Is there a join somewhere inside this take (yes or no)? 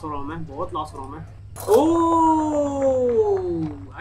yes